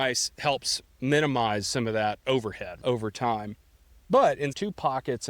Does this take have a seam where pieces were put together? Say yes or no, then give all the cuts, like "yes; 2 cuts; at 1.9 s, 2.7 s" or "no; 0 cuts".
yes; 2 cuts; at 2.8 s, 4.5 s